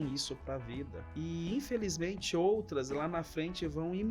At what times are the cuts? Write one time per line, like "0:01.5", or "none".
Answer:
0:01.0